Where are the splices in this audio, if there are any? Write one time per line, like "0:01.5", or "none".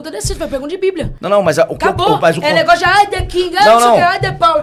none